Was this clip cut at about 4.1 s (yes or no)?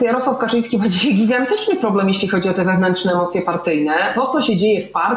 yes